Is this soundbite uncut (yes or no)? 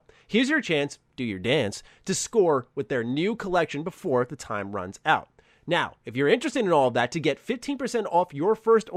yes